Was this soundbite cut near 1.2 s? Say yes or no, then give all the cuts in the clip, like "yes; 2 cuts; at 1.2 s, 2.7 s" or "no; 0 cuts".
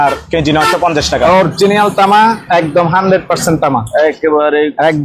yes; 1 cut; at 1.2 s